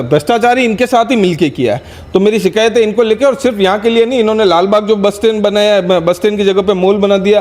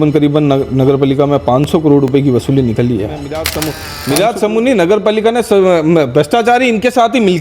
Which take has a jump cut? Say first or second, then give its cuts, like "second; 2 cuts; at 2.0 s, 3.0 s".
second; 1 cut; at 3.2 s